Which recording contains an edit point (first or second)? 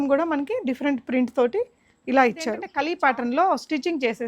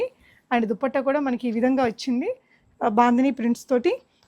first